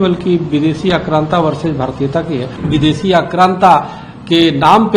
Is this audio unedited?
no; 1 cut; at 2.5 s

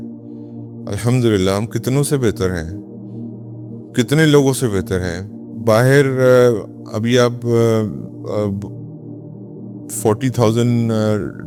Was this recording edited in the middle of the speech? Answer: no; 0 cuts

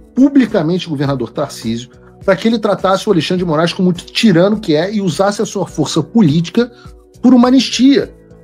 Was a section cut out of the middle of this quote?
no; 0 cuts

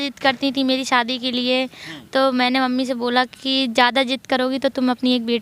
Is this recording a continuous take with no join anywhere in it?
yes; 0 cuts

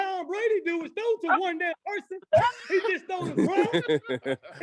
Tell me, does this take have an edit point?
no; 0 cuts

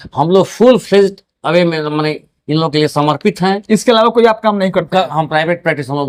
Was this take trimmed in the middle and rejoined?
no; 0 cuts

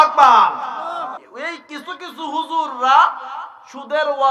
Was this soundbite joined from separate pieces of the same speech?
yes; 1 cut; at 1.2 s

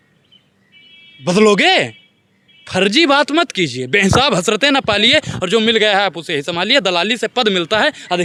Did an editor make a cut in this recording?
no; 0 cuts

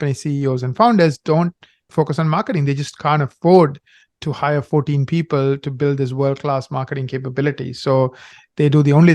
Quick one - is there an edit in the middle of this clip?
yes; 1 cut; at 1.9 s

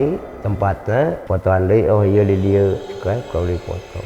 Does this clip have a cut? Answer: yes; 1 cut; at 1.2 s

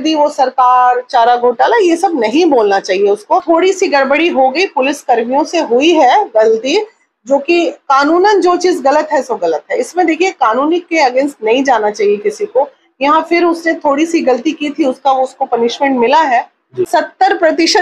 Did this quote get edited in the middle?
yes; 2 cuts; at 3.4 s, 16.9 s

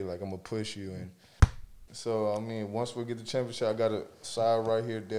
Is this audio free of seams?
no; 1 cut; at 1.6 s

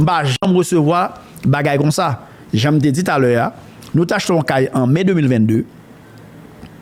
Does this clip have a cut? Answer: no; 0 cuts

